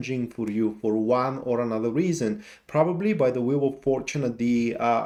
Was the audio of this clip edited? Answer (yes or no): no